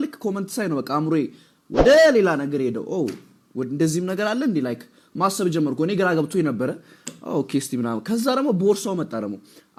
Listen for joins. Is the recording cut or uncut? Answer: uncut